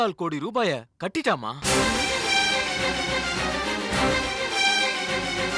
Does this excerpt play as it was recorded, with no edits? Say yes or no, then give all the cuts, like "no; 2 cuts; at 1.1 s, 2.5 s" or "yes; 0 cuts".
yes; 0 cuts